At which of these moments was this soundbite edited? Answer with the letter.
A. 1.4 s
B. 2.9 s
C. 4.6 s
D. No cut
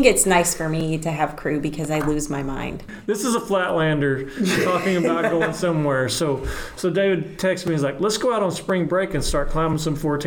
B